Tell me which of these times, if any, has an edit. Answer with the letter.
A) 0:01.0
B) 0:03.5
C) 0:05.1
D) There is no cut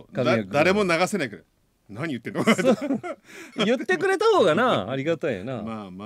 B